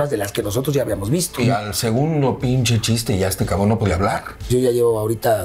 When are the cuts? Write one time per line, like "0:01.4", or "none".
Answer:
0:01.4
0:04.3